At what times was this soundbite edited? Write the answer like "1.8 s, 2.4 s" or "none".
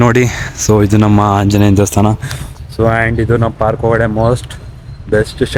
none